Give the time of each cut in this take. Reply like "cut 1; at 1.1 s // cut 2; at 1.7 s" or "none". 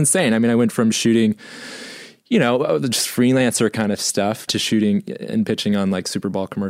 cut 1; at 4.5 s